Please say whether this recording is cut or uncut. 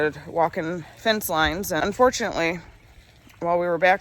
cut